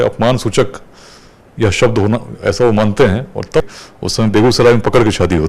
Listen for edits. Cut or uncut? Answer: cut